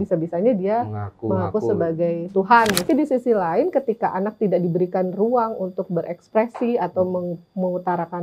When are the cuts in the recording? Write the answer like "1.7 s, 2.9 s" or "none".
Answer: 2.8 s